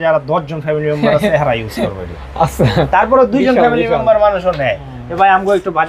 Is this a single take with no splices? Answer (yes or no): yes